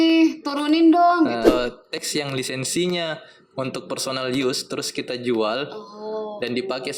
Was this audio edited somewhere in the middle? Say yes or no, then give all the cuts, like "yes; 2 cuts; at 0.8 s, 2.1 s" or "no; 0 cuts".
yes; 1 cut; at 1.5 s